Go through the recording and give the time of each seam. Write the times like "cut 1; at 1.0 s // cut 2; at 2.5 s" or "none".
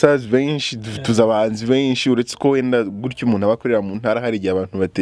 none